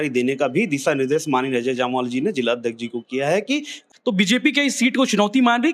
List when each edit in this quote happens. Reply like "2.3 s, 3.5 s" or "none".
3.8 s